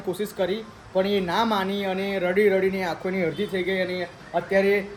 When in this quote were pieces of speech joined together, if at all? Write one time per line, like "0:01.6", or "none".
none